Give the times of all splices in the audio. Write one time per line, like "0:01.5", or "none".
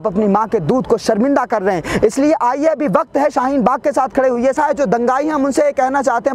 0:04.5